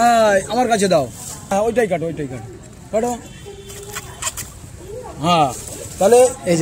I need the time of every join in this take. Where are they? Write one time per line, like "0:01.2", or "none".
0:01.5